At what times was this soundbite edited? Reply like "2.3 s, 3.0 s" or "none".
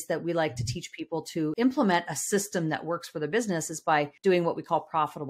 1.5 s, 4.1 s